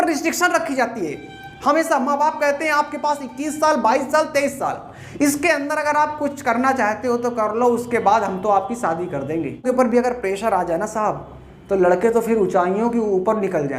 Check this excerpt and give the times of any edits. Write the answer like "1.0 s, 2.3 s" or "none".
9.6 s